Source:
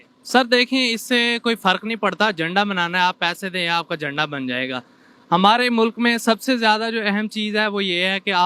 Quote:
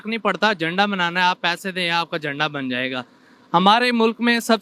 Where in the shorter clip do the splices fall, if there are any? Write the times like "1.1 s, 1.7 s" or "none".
none